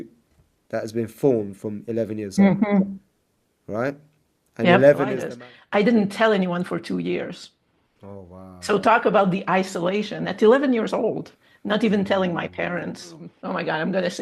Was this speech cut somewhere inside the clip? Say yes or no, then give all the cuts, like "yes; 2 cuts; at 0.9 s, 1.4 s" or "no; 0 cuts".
yes; 2 cuts; at 5.2 s, 13.3 s